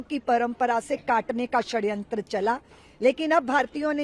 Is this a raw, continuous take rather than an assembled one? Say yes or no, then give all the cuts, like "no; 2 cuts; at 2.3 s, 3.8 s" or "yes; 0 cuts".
yes; 0 cuts